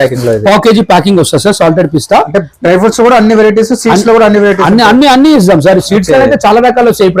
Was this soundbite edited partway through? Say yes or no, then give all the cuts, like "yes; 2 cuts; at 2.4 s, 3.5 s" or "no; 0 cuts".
no; 0 cuts